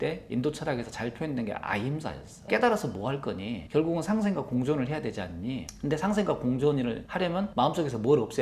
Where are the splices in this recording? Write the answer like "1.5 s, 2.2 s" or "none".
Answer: 2.3 s